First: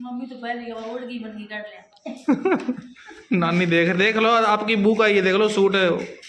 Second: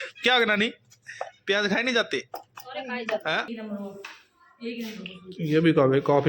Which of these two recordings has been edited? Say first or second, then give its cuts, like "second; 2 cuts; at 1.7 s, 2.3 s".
second; 1 cut; at 3.5 s